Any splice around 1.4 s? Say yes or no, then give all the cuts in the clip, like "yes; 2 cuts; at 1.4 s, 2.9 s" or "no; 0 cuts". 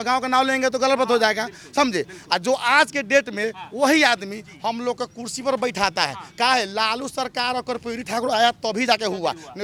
no; 0 cuts